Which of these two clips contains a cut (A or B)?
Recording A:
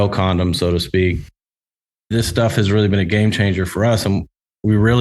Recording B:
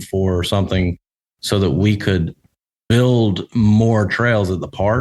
A